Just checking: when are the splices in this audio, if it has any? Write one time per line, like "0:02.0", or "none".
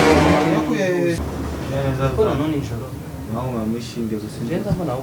0:01.3